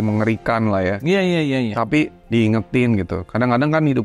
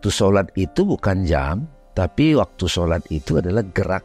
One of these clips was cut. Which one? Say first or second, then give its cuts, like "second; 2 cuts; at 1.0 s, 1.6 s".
first; 1 cut; at 2.2 s